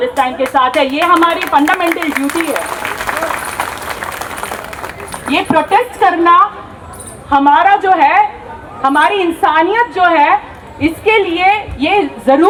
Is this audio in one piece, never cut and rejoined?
yes; 0 cuts

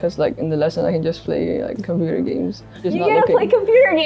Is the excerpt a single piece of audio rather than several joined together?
yes; 0 cuts

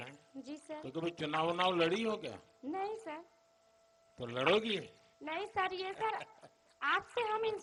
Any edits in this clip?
no; 0 cuts

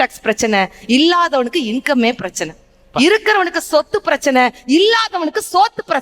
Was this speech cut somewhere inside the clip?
no; 0 cuts

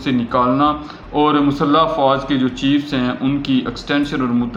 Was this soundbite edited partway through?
no; 0 cuts

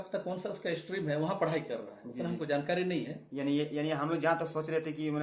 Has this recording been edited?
no; 0 cuts

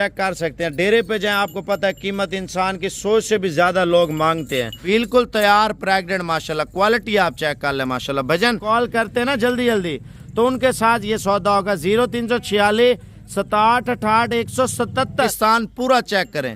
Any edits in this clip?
yes; 3 cuts; at 4.8 s, 8.6 s, 15.3 s

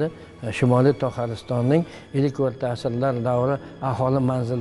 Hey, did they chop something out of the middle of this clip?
no; 0 cuts

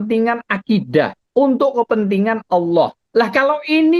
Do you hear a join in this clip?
yes; 2 cuts; at 1.2 s, 3.0 s

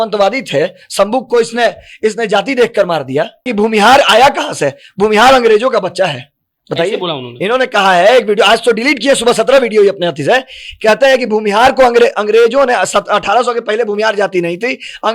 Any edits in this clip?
yes; 1 cut; at 3.5 s

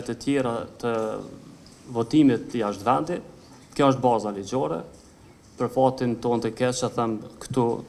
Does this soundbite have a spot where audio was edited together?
no; 0 cuts

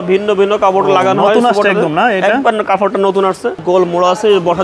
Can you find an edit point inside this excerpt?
yes; 1 cut; at 3.6 s

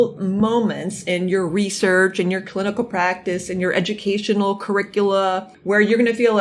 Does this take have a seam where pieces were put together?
yes; 1 cut; at 5.5 s

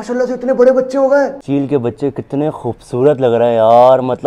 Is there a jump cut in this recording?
yes; 1 cut; at 1.4 s

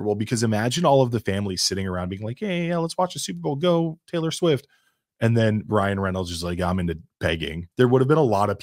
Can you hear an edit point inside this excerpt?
yes; 1 cut; at 7.6 s

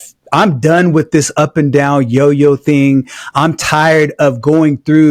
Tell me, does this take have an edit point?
no; 0 cuts

